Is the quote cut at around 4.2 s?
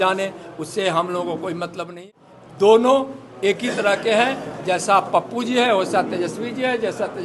no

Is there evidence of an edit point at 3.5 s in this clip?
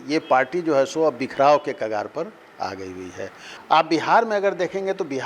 yes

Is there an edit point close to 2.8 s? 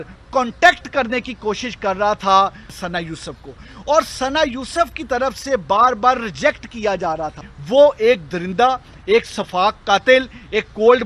yes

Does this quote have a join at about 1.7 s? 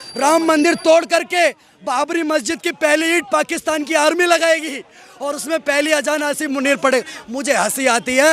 no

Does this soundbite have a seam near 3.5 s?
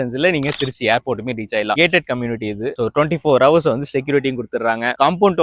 no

